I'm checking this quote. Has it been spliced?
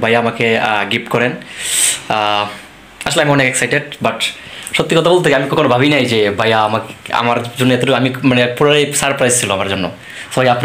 no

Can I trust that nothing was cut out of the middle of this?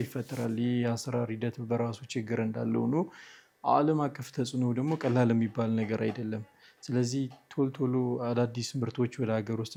yes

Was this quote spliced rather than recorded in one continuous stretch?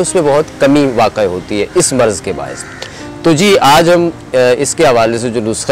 no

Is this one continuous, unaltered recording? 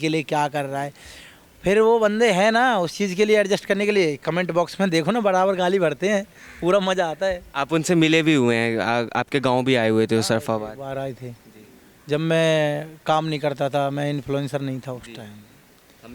yes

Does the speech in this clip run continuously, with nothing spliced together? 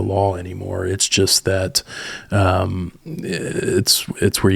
yes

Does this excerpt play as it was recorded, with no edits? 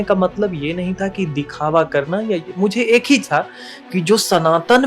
yes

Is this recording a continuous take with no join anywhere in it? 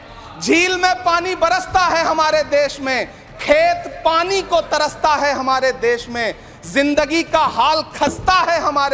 yes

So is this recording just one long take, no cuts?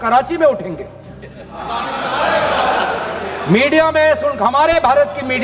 yes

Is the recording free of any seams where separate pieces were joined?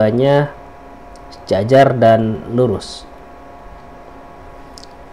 yes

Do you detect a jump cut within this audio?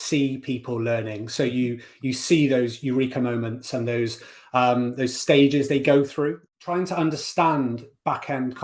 yes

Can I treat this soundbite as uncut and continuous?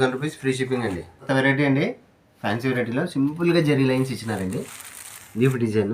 no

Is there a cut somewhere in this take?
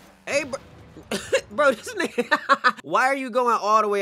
no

